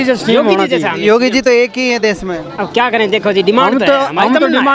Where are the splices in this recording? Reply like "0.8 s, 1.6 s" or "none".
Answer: none